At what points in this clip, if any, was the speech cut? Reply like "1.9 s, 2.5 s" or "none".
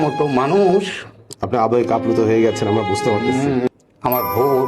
3.7 s